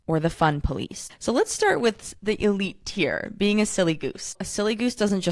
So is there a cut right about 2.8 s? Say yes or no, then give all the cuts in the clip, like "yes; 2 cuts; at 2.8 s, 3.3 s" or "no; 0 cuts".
no; 2 cuts; at 1.0 s, 4.4 s